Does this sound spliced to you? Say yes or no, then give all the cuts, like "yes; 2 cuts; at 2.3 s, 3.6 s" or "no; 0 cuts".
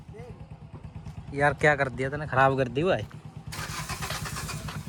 no; 0 cuts